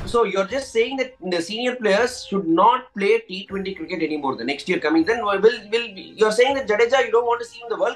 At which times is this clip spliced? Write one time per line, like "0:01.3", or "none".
none